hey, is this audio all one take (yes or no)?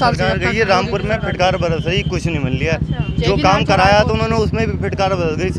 yes